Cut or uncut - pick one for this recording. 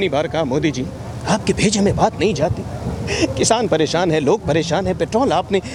uncut